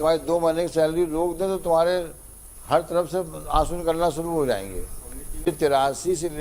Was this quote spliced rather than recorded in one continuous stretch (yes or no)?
yes